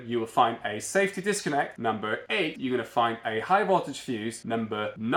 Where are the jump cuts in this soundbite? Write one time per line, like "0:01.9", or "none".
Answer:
none